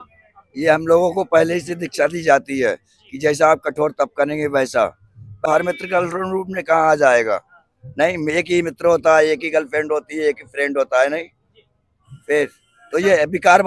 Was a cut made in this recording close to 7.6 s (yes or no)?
no